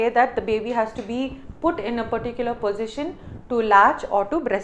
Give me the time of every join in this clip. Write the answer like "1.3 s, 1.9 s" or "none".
none